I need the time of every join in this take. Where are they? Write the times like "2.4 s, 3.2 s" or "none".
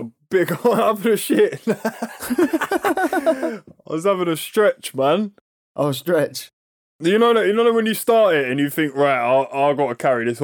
none